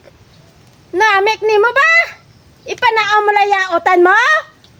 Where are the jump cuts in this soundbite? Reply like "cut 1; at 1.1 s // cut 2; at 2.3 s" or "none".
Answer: none